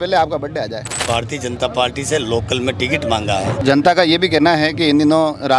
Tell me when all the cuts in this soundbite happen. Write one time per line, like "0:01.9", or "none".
0:01.0
0:03.6